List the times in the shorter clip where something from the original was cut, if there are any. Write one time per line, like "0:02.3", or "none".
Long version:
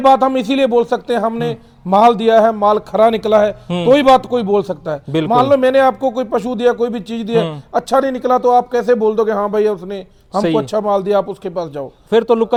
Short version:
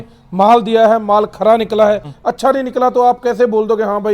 0:02.1